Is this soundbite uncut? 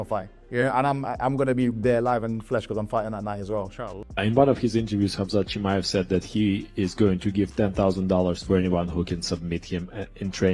no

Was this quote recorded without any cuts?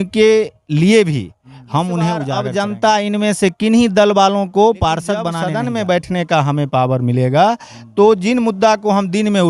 no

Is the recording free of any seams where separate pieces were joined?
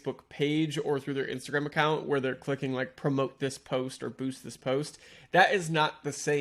yes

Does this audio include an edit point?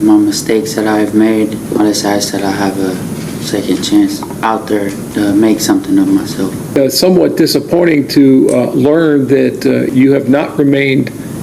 yes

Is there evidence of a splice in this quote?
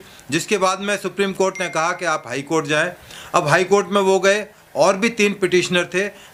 no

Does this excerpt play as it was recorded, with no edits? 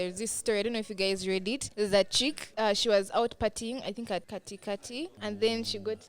no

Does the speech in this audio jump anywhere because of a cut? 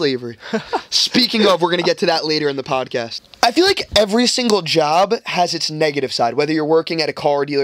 yes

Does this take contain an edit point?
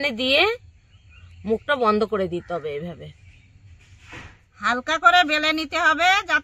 yes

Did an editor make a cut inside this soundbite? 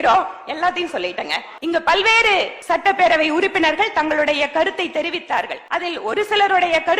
yes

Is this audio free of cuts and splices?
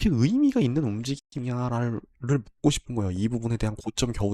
yes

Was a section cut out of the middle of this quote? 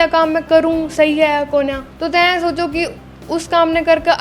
yes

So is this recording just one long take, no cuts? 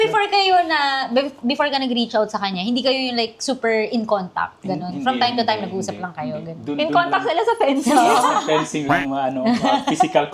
yes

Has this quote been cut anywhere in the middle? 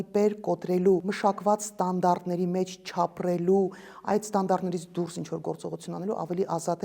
yes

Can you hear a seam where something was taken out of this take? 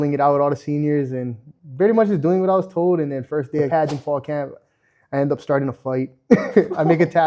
yes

